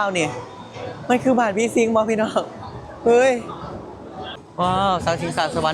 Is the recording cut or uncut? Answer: cut